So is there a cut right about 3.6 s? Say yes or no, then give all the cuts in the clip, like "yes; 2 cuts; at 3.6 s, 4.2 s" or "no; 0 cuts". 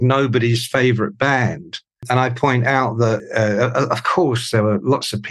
no; 1 cut; at 2.0 s